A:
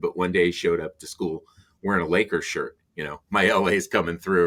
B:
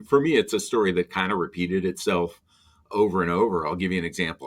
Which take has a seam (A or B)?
B